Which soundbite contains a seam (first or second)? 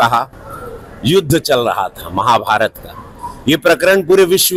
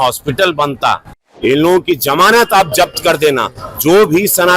second